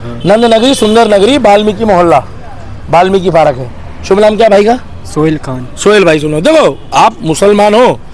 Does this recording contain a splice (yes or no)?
no